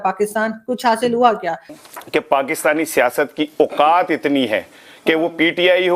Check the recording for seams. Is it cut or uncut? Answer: cut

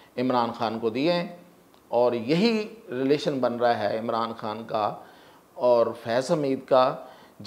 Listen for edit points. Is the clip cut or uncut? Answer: uncut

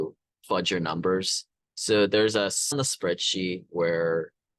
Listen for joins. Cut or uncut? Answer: cut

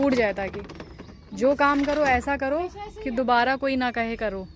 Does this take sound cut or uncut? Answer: uncut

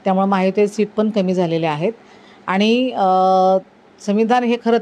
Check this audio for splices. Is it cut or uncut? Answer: uncut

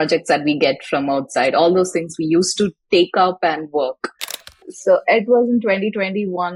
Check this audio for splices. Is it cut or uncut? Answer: cut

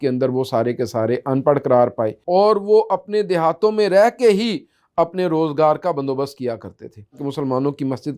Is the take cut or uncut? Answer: cut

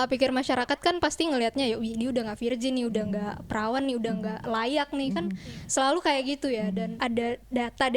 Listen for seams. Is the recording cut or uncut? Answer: cut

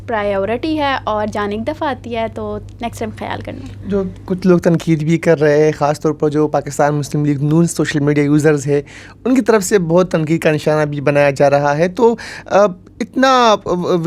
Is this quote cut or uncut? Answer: uncut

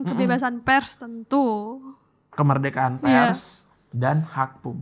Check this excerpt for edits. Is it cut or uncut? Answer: uncut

